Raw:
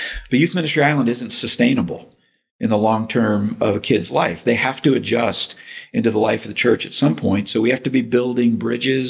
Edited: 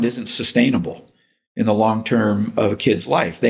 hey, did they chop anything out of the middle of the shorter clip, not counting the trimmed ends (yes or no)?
no